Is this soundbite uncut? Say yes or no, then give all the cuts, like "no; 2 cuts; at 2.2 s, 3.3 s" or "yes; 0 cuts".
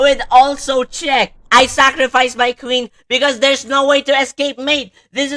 no; 1 cut; at 1.4 s